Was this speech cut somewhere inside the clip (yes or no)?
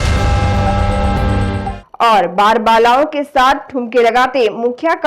yes